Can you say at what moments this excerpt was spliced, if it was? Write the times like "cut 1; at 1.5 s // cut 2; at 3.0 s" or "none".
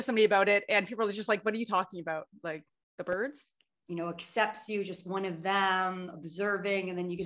cut 1; at 3.5 s